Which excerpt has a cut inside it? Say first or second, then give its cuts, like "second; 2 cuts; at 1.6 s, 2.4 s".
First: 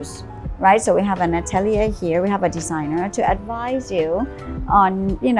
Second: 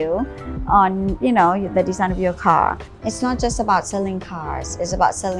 second; 1 cut; at 2.9 s